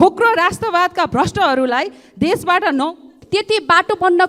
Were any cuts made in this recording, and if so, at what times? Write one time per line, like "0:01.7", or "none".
0:03.1